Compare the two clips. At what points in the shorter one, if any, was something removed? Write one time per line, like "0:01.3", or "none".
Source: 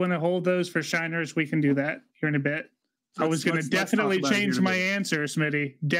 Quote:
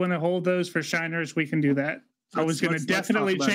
0:02.0

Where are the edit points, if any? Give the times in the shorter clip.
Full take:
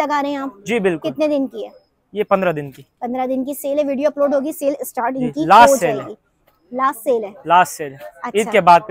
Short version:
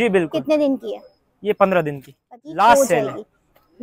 0:02.3

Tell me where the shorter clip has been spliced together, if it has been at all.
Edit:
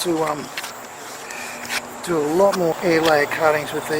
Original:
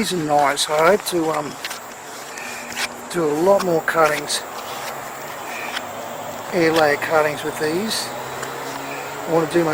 0:02.8

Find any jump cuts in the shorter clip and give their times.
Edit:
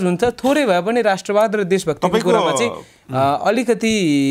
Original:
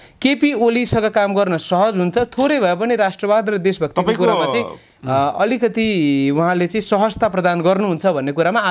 none

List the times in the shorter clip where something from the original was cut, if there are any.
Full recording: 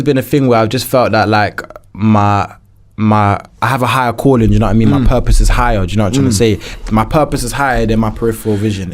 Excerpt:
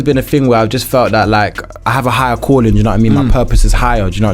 0:01.8

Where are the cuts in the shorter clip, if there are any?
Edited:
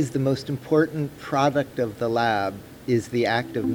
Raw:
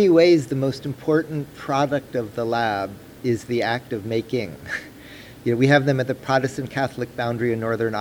none

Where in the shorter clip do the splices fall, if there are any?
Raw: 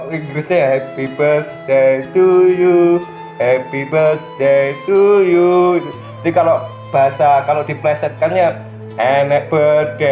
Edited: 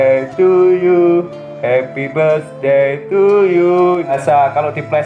0:04.2

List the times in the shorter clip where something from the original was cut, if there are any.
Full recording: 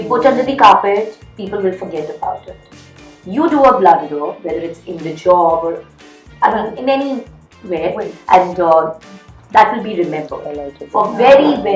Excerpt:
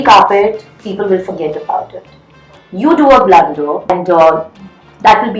0:03.9

